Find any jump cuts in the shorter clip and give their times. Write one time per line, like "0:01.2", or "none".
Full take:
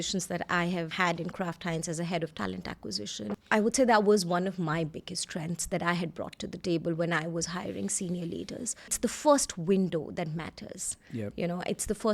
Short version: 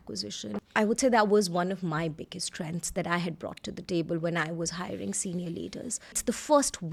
none